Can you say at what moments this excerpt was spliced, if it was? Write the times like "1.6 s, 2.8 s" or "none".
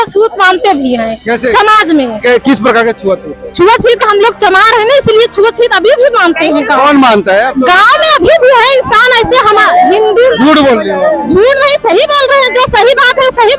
none